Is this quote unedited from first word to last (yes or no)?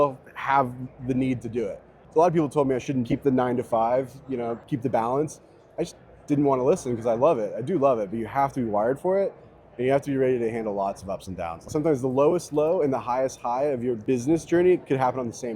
no